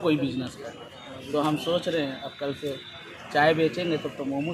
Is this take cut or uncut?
uncut